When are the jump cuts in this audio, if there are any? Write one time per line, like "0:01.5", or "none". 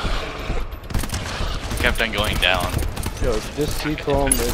none